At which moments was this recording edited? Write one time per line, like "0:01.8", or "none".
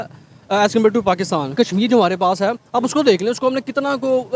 0:01.5